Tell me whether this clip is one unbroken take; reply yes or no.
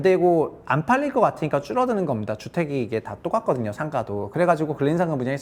yes